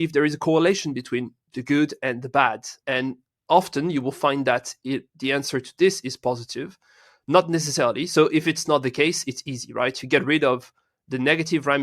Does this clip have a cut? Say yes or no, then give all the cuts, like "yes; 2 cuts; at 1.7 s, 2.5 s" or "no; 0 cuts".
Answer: yes; 1 cut; at 2.8 s